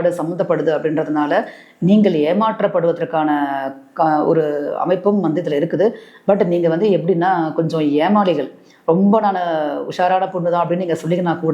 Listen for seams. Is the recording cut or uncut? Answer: uncut